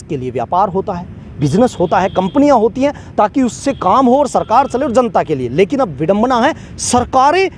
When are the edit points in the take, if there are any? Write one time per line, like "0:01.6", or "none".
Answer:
none